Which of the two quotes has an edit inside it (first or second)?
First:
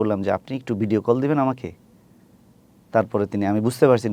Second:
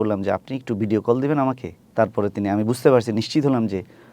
second